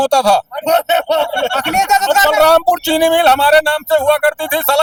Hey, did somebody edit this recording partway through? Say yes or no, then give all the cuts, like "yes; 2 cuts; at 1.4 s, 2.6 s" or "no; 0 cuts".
no; 0 cuts